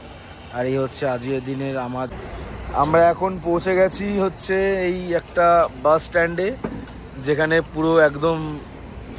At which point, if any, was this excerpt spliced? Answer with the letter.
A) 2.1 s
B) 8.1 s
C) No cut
A